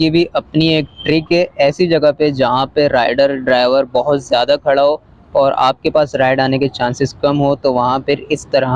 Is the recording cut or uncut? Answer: uncut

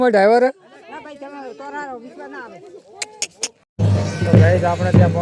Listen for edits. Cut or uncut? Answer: cut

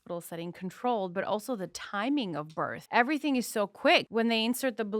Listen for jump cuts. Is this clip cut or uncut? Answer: cut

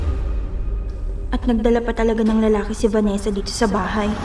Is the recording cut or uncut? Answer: uncut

